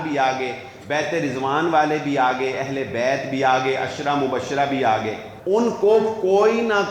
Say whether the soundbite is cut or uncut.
cut